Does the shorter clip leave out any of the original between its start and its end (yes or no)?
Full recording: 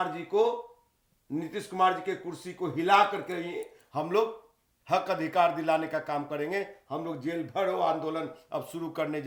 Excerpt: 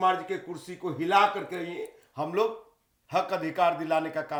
no